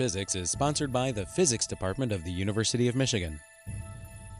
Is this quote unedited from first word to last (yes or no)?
no